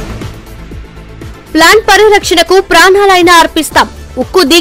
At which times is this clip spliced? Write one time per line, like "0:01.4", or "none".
0:01.3